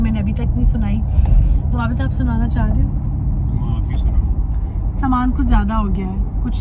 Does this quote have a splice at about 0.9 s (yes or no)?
no